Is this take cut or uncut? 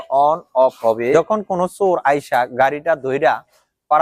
cut